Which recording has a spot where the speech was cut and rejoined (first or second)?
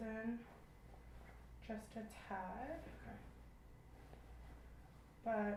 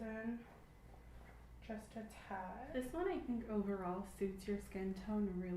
second